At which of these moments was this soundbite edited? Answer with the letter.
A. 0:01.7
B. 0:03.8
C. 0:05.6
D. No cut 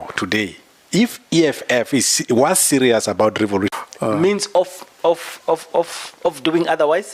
B